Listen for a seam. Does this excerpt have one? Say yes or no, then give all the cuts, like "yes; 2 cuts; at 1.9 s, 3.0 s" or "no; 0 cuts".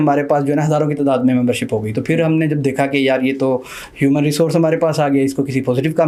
no; 0 cuts